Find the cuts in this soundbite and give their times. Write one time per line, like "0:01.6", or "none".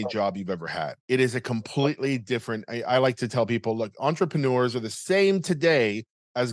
0:01.0